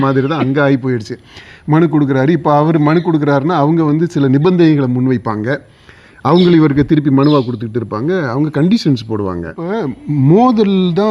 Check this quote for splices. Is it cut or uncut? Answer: cut